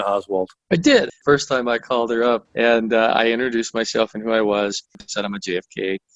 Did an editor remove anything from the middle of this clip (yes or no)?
yes